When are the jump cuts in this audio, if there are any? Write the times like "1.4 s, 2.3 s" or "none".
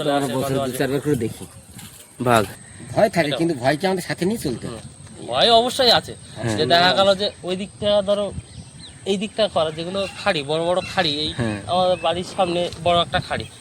2.6 s